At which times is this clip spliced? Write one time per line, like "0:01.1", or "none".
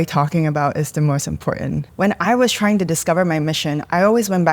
0:01.9

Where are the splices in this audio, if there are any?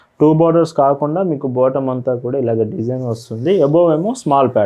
none

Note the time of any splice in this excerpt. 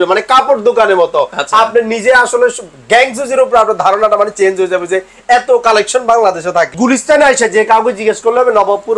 0:06.7

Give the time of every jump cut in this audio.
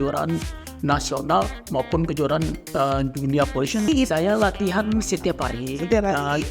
0:03.9

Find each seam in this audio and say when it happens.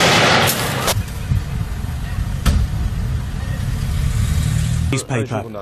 none

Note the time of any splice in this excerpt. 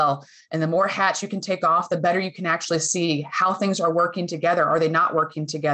none

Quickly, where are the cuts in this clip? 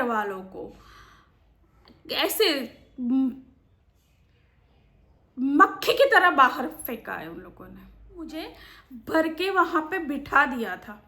0:08.1

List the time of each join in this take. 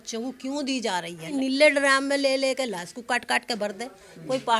0:01.3

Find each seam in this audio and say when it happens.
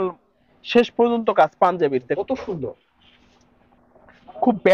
0:02.2

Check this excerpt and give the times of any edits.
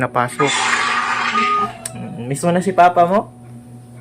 0:01.7

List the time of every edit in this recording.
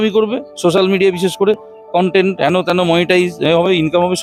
none

